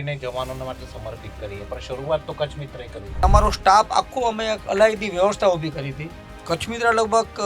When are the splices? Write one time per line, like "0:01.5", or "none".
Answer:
0:03.2

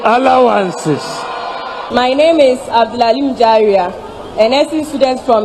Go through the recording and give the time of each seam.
0:01.8

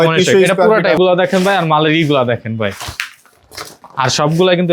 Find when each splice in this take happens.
0:01.0

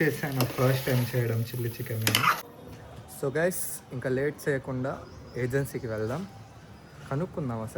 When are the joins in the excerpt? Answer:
0:02.5

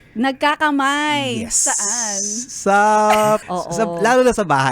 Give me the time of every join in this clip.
0:03.4

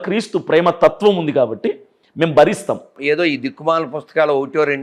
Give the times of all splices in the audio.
0:02.9

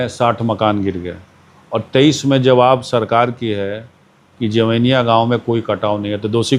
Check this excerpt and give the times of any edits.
none

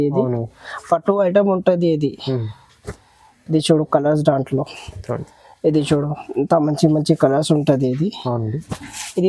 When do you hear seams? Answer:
none

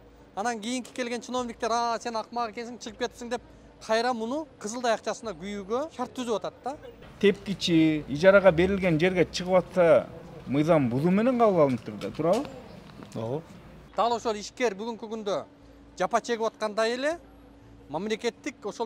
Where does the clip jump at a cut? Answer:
0:04.6
0:05.9
0:07.0
0:08.1
0:13.8

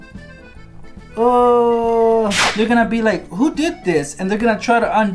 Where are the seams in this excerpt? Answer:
0:02.4

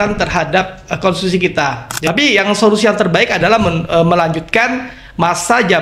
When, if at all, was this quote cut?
0:01.9

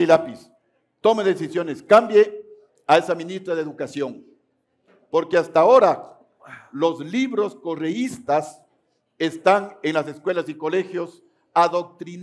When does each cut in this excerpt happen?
none

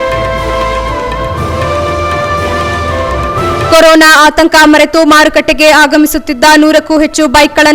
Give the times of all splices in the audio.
0:03.7

